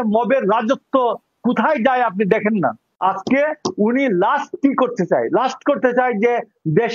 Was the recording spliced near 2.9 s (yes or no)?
yes